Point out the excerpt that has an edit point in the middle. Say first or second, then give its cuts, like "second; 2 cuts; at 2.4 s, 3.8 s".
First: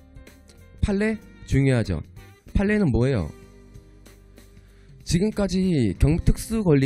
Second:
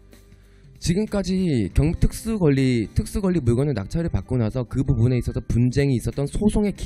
first; 1 cut; at 1.1 s